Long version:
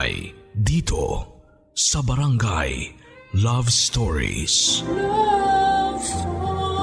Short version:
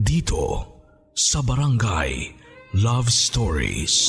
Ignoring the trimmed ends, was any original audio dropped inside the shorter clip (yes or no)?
no